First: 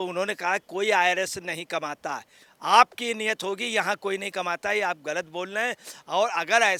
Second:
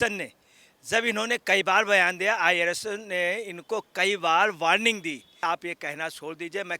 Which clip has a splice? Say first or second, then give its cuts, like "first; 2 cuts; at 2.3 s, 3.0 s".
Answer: second; 1 cut; at 5.4 s